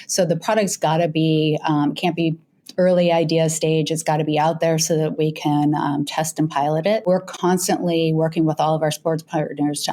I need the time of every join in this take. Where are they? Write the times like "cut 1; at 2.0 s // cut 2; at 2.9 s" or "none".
cut 1; at 7.1 s